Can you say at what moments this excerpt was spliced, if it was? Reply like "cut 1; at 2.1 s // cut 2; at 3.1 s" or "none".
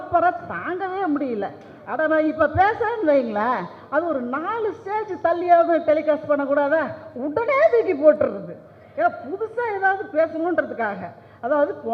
none

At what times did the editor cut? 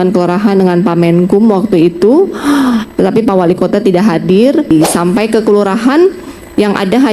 cut 1; at 4.7 s

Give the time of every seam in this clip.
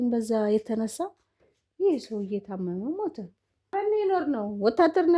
cut 1; at 3.7 s

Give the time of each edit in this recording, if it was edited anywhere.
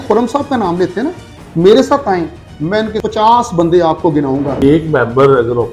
cut 1; at 3.0 s // cut 2; at 4.5 s

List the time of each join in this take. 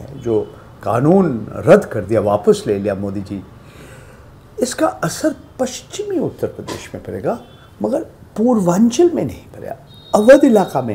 none

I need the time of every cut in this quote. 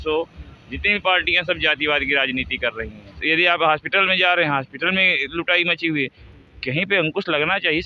cut 1; at 3.1 s

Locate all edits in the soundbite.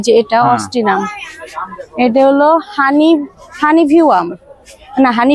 none

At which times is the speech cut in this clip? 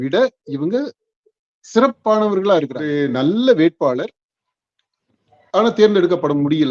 cut 1; at 2.9 s

